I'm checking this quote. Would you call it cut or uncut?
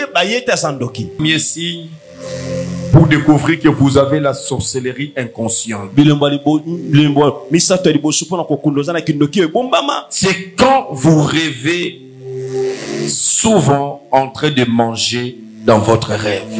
cut